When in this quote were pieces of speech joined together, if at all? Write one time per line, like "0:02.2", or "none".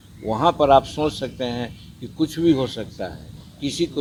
none

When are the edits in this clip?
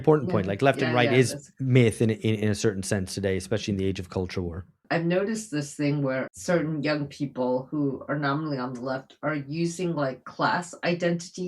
0:04.8
0:06.3

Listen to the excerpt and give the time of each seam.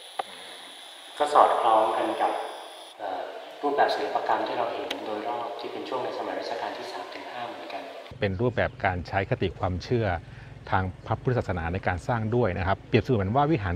0:08.2

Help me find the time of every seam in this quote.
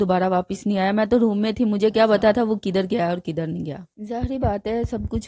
0:03.9

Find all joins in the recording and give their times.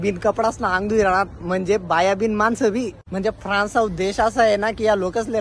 0:03.0

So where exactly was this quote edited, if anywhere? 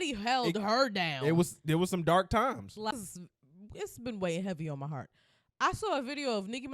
0:02.9

